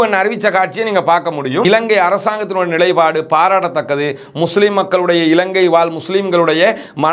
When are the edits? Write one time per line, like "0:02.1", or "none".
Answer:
0:01.6